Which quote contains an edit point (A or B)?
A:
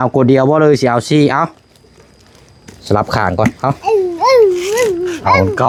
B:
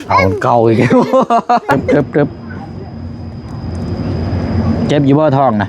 B